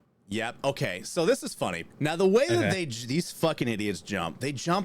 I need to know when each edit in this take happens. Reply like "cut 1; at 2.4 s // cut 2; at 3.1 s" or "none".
cut 1; at 1.8 s